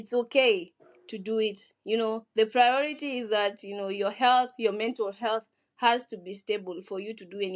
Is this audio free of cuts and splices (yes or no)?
yes